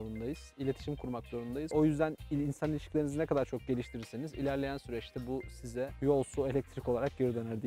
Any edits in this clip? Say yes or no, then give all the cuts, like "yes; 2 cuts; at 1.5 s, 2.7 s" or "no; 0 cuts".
no; 0 cuts